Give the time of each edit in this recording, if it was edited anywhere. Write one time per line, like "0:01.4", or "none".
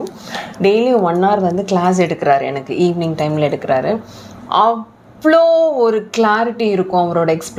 none